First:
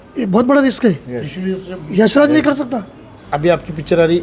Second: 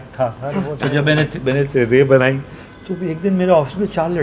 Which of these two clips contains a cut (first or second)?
first